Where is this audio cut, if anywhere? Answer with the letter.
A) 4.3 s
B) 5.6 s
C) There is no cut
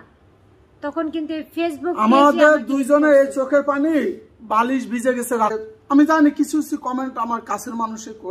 B